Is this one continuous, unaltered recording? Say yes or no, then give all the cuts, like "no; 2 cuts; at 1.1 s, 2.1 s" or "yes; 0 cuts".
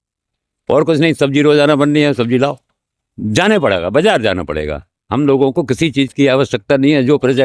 yes; 0 cuts